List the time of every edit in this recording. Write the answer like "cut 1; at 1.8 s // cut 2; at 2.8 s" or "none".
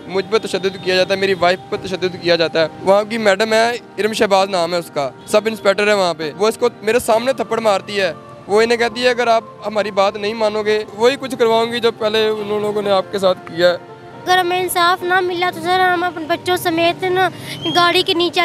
cut 1; at 2.8 s // cut 2; at 5.2 s // cut 3; at 6.3 s // cut 4; at 10.9 s // cut 5; at 14.2 s